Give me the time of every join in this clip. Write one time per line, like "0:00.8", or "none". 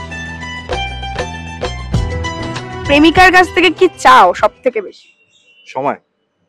0:02.8